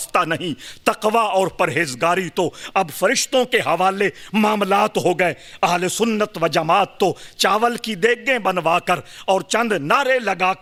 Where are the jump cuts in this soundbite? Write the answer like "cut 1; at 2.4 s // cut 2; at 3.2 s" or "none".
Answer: none

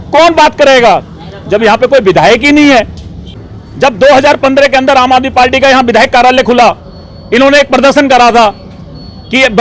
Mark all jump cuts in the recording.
cut 1; at 3.3 s

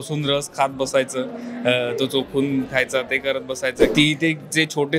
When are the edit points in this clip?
cut 1; at 3.9 s

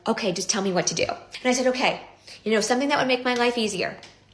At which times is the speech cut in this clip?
cut 1; at 1.3 s

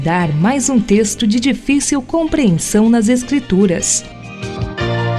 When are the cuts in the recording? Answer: cut 1; at 4.0 s

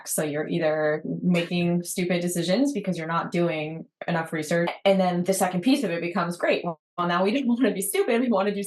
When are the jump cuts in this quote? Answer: cut 1; at 4.7 s

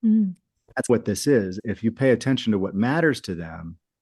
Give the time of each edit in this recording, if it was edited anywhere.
cut 1; at 1.6 s

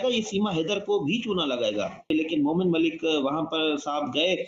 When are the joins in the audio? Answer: cut 1; at 2.1 s

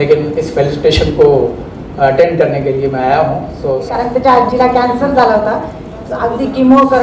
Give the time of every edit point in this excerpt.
cut 1; at 3.9 s

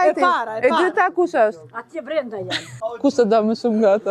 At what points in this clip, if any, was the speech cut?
cut 1; at 2.7 s

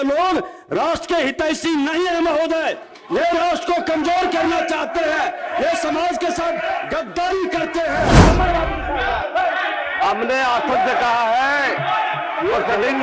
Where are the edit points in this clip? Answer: cut 1; at 8.2 s

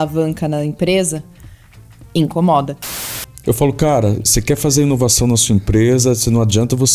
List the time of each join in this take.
cut 1; at 2.8 s

